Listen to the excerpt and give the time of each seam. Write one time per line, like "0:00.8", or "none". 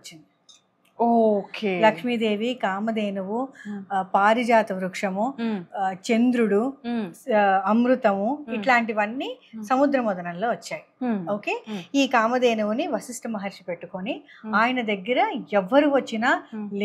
none